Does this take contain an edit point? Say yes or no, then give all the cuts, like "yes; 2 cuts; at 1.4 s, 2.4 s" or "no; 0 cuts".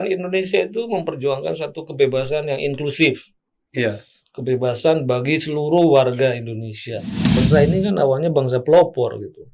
yes; 1 cut; at 7.4 s